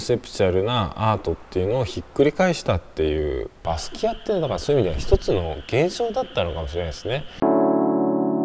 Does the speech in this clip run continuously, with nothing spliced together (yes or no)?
no